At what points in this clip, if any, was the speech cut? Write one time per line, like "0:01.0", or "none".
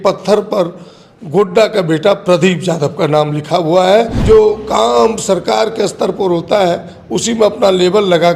0:04.2